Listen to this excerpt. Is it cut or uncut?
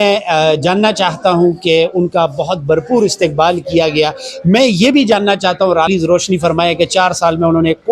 cut